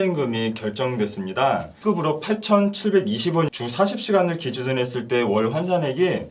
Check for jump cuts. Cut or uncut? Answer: cut